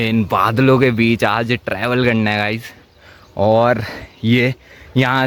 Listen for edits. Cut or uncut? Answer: uncut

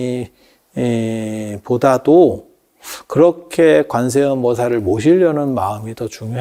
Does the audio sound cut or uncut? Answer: uncut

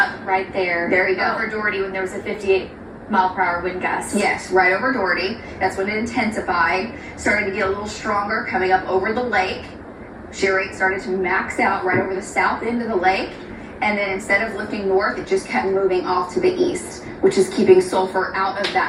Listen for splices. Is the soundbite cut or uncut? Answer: uncut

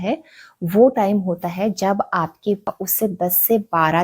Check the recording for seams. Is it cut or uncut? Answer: cut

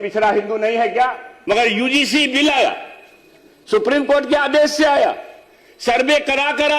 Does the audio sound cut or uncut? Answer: cut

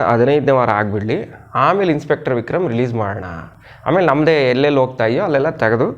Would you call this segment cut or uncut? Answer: uncut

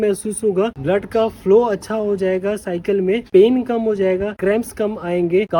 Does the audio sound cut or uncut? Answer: uncut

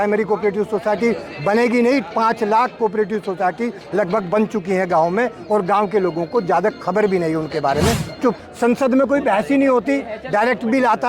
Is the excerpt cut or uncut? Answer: cut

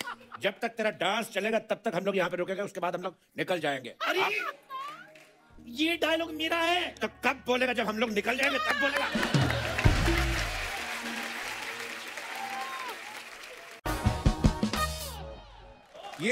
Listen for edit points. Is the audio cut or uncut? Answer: cut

